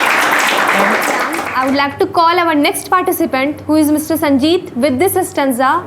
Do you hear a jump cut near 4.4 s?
no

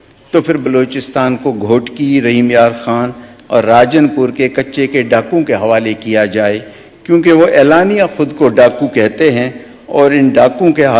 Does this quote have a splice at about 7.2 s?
no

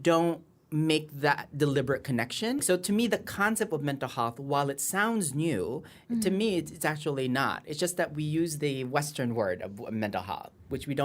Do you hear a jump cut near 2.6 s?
yes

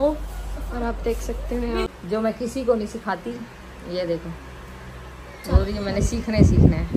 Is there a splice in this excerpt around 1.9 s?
yes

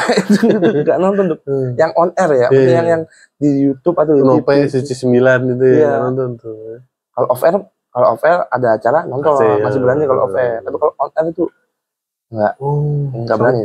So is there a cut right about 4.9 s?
no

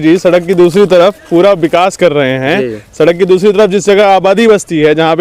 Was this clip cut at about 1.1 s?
no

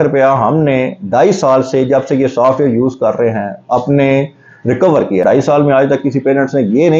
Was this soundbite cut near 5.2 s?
yes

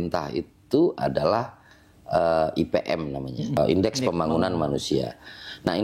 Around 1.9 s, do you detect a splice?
no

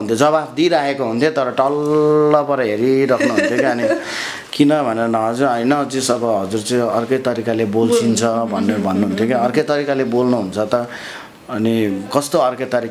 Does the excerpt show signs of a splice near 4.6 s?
no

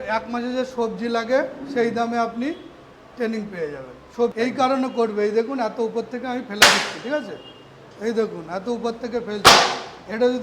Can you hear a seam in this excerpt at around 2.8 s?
no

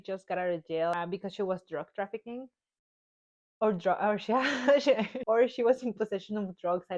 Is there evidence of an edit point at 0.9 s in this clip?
yes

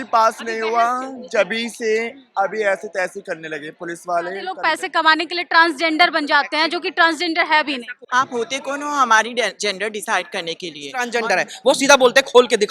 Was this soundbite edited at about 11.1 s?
yes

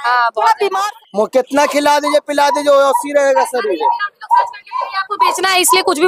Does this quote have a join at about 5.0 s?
yes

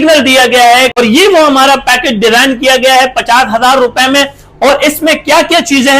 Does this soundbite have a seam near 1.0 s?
yes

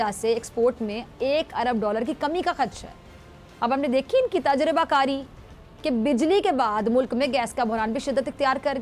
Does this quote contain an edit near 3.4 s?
no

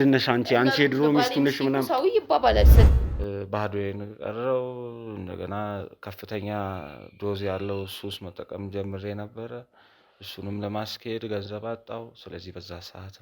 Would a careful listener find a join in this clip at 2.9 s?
yes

